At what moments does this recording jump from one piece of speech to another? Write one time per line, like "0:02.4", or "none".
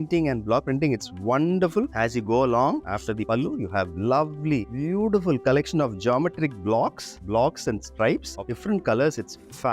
none